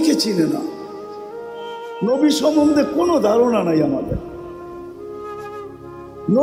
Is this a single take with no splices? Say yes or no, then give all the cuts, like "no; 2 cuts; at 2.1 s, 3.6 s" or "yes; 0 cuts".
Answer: yes; 0 cuts